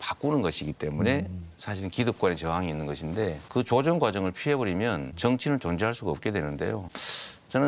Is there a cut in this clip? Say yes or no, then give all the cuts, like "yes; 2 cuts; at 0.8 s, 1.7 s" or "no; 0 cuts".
no; 0 cuts